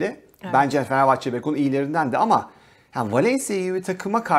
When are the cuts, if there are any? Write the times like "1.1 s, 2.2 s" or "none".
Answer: none